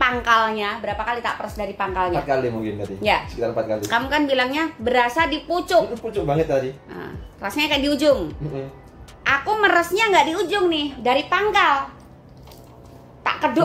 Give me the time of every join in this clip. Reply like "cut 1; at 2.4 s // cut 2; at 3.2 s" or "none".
none